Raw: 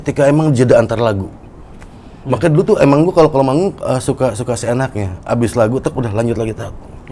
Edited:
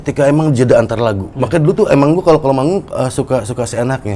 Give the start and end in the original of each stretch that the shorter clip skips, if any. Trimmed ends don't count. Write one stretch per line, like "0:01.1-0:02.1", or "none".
0:01.3-0:02.2